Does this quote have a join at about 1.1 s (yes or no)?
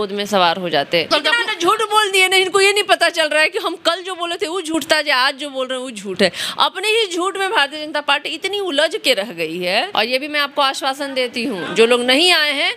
yes